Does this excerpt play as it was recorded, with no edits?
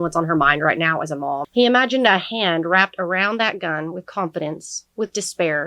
no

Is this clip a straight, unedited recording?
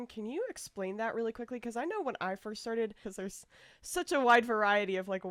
no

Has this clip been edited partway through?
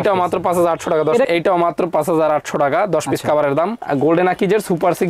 yes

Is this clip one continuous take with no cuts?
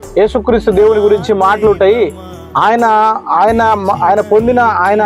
yes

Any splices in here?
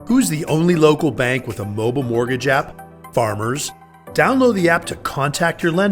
no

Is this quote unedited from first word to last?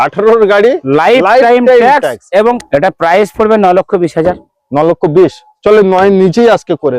no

